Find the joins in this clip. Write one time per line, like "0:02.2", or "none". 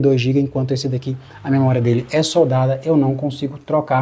none